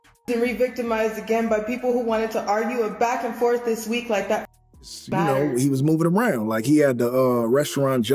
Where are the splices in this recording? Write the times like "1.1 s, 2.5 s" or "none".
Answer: 5.2 s